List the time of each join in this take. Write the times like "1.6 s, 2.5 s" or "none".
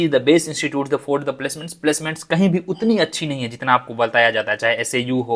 none